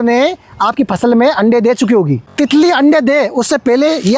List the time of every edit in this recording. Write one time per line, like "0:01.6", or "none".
0:02.2